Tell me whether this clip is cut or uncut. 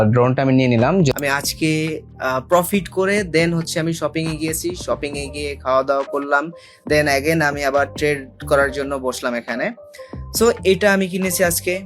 cut